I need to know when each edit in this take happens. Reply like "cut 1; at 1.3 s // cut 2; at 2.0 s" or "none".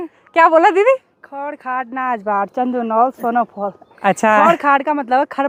none